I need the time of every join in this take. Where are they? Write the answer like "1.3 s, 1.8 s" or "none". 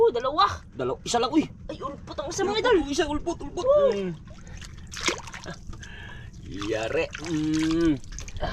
none